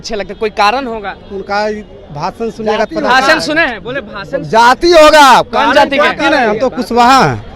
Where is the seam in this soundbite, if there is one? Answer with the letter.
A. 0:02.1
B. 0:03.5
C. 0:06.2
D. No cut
D